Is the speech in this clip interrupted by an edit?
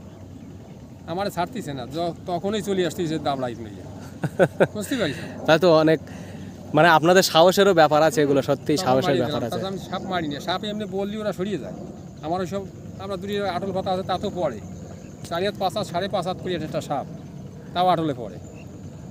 no; 0 cuts

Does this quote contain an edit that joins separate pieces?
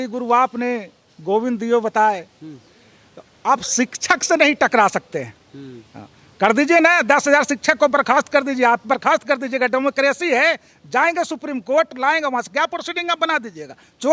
no; 0 cuts

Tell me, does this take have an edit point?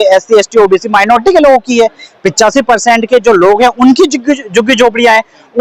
no; 0 cuts

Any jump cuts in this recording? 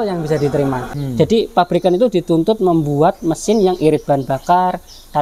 yes; 1 cut; at 0.9 s

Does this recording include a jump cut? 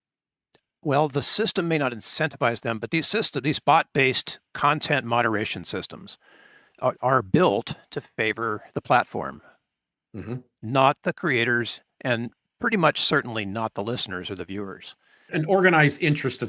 yes; 1 cut; at 15.3 s

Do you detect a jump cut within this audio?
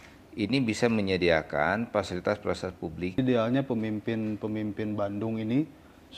yes; 1 cut; at 3.2 s

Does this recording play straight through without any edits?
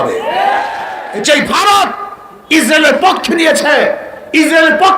no; 1 cut; at 1.1 s

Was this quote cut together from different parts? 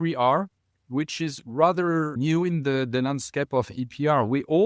no; 0 cuts

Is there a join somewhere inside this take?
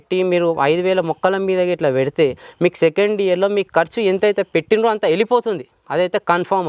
no; 0 cuts

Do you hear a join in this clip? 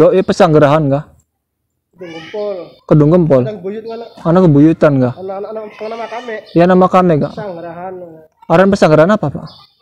no; 0 cuts

